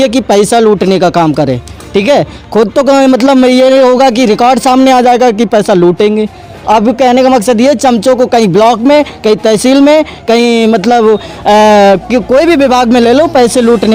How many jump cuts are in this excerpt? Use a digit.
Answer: 0